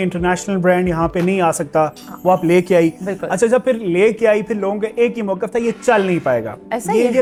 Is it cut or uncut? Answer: uncut